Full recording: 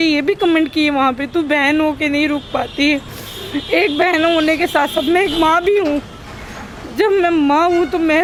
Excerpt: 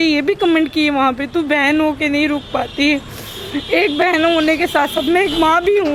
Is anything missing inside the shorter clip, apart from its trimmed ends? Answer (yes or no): no